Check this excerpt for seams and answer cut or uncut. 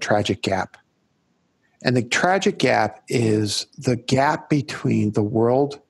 uncut